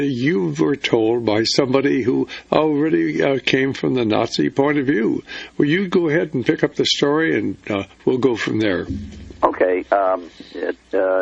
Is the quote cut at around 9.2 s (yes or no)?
no